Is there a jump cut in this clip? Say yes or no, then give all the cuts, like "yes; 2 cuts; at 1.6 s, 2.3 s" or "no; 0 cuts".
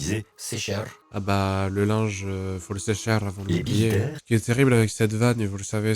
yes; 1 cut; at 4.2 s